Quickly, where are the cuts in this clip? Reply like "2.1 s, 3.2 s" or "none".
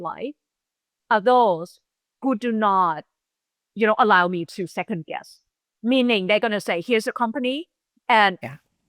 none